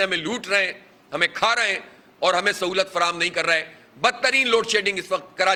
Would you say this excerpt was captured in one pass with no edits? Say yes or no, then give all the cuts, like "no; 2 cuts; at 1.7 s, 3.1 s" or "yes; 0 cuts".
yes; 0 cuts